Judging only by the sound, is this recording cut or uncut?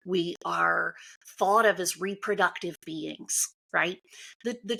uncut